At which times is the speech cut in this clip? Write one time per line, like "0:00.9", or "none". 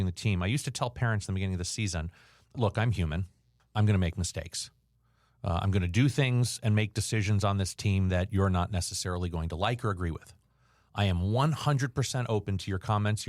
0:02.5